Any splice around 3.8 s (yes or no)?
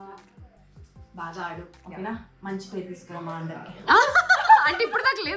no